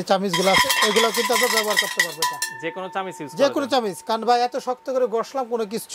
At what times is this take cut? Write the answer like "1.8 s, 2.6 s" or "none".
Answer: none